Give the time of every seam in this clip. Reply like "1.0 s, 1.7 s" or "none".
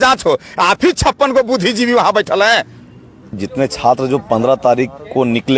3.4 s